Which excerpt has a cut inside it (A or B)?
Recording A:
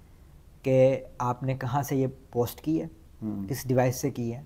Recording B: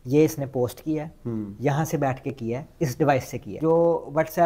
B